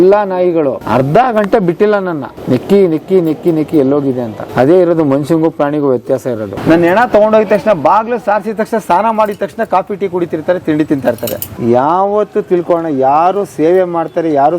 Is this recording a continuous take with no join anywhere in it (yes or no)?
no